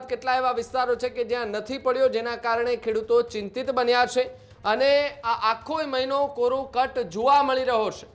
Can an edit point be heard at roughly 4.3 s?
no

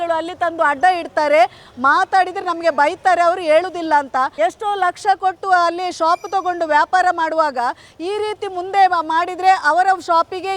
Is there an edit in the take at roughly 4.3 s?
yes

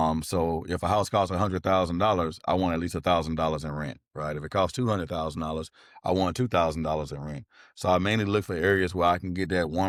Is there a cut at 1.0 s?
no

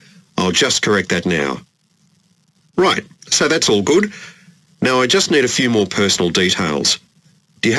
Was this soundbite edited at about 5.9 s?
yes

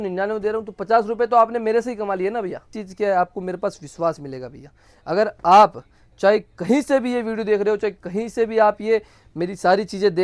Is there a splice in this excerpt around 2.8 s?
yes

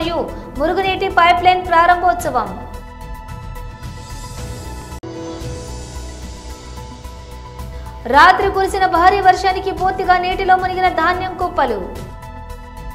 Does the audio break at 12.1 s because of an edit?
yes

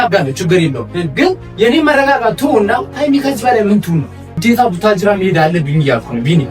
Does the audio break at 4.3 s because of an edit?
yes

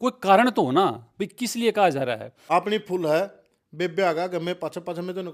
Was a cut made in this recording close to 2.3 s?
yes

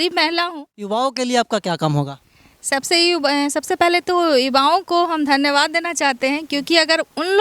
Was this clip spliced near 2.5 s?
no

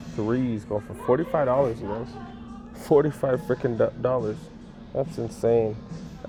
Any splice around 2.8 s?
no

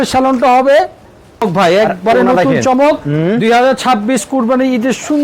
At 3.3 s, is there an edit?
no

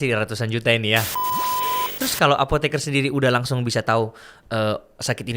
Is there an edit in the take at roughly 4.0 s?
no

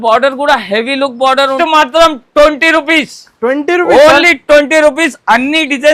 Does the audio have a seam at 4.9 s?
no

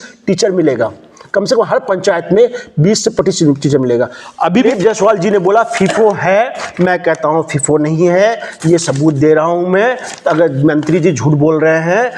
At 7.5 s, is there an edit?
no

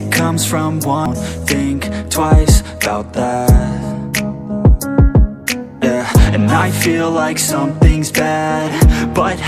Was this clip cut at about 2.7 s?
no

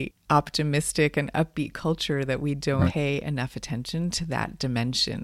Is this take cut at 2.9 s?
yes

